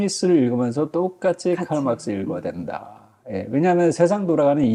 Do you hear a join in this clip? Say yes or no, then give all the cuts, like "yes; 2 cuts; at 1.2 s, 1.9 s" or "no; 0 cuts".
no; 0 cuts